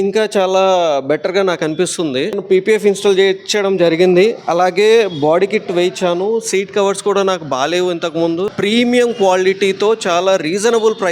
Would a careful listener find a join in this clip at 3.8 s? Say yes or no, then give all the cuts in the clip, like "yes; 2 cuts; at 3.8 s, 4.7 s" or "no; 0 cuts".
no; 2 cuts; at 2.4 s, 8.5 s